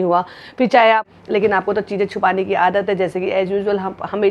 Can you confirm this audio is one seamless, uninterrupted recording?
no; 1 cut; at 1.0 s

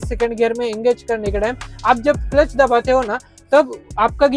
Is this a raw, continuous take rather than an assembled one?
yes; 0 cuts

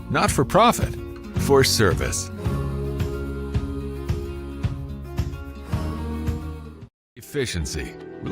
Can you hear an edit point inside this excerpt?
yes; 1 cut; at 7.3 s

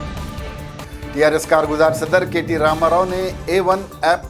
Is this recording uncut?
no; 1 cut; at 1.3 s

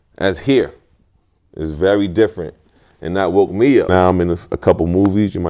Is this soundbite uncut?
no; 1 cut; at 3.9 s

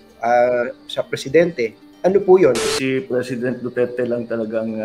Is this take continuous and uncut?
no; 2 cuts; at 1.8 s, 2.6 s

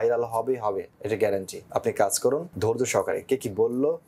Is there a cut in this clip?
yes; 3 cuts; at 0.9 s, 1.6 s, 2.5 s

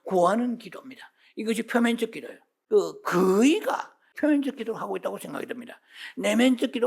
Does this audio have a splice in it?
yes; 2 cuts; at 2.6 s, 4.1 s

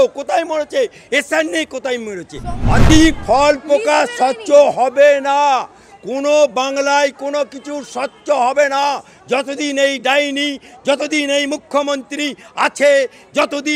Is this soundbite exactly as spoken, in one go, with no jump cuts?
no; 1 cut; at 2.8 s

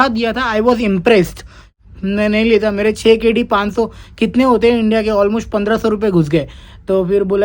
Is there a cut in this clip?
yes; 1 cut; at 1.6 s

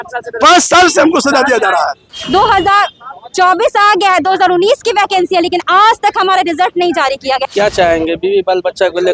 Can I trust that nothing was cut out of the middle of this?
no; 2 cuts; at 2.1 s, 7.4 s

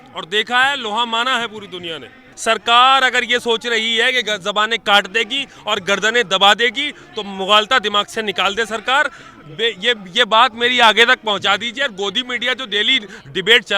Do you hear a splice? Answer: yes; 1 cut; at 2.3 s

